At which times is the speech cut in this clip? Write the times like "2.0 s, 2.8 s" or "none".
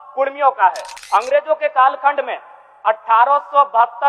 0.9 s